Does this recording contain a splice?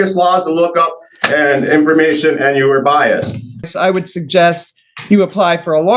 yes; 1 cut; at 3.7 s

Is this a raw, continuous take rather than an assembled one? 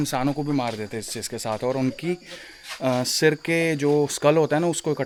yes; 0 cuts

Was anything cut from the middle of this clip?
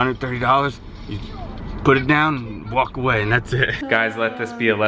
yes; 1 cut; at 3.8 s

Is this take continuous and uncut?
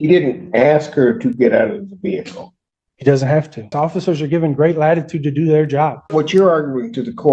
no; 2 cuts; at 3.7 s, 6.1 s

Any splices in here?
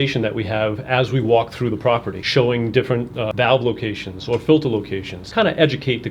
yes; 3 cuts; at 2.2 s, 3.3 s, 5.2 s

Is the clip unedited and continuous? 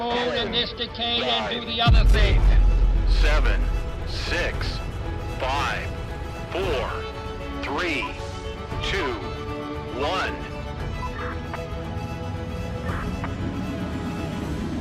yes; 0 cuts

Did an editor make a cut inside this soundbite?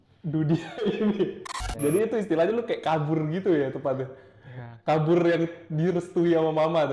yes; 1 cut; at 1.6 s

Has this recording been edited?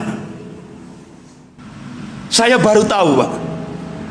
yes; 1 cut; at 1.7 s

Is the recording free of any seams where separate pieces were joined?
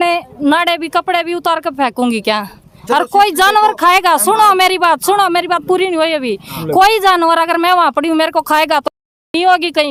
yes; 0 cuts

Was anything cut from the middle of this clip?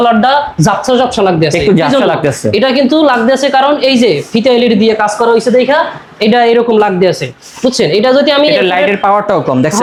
no; 0 cuts

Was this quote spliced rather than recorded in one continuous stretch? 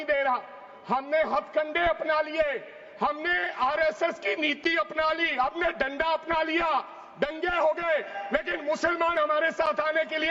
no; 0 cuts

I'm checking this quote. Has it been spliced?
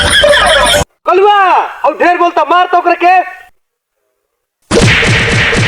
yes; 1 cut; at 3.4 s

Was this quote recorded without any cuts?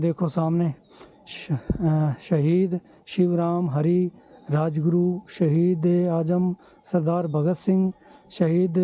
yes; 0 cuts

